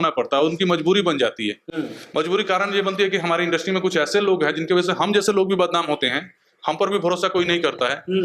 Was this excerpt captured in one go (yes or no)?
yes